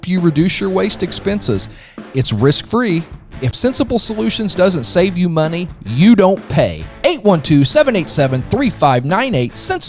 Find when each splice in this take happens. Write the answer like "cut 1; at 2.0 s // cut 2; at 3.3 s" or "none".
cut 1; at 3.5 s